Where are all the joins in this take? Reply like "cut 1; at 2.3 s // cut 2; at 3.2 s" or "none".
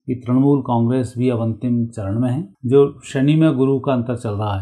cut 1; at 2.5 s